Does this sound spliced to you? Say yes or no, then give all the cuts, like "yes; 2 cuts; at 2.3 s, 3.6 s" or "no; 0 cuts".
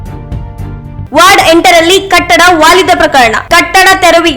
yes; 1 cut; at 1.0 s